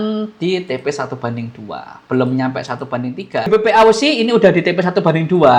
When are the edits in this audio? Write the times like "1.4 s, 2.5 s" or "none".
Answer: 3.5 s